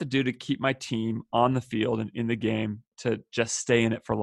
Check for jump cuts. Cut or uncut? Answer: cut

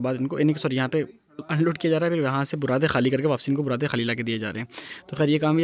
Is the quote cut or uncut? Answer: uncut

